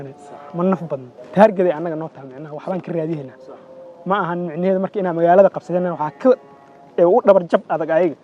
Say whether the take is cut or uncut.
cut